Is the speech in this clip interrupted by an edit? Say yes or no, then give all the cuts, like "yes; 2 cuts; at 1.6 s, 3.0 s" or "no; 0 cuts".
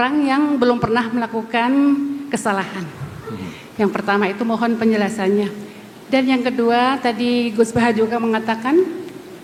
no; 0 cuts